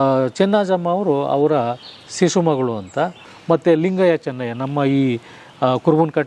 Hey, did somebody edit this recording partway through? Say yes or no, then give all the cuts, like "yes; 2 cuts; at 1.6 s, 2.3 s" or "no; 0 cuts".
yes; 1 cut; at 3.3 s